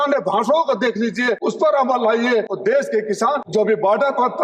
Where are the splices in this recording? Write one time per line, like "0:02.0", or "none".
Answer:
0:01.4
0:02.5
0:03.4